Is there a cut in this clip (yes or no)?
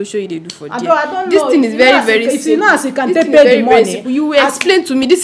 no